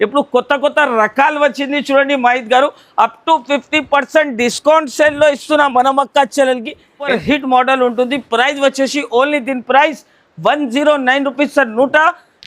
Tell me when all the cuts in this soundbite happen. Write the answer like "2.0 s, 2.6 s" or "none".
7.2 s